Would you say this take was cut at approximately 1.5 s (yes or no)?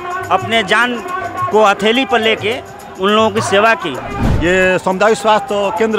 no